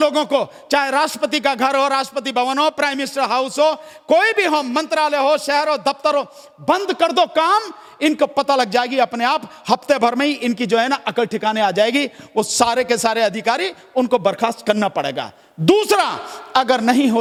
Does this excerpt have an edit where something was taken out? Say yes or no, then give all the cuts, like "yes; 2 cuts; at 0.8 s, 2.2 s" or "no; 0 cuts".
no; 0 cuts